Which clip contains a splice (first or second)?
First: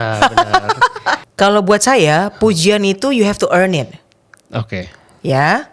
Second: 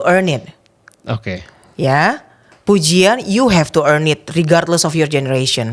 first